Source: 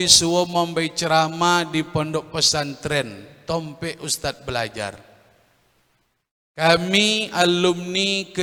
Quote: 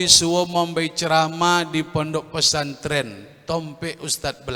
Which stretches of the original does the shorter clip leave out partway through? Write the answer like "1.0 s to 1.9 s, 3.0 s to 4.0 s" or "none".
none